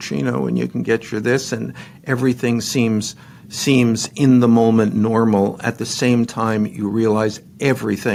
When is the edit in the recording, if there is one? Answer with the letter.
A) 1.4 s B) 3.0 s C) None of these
C